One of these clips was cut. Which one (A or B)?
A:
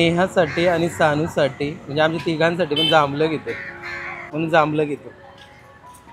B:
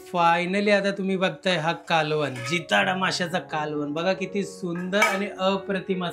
A